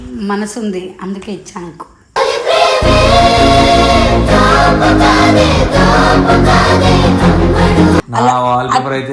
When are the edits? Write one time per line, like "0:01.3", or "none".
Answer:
0:08.1